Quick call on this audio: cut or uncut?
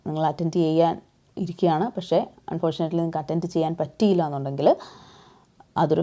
uncut